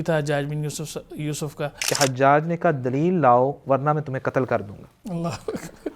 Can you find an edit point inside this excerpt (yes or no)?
yes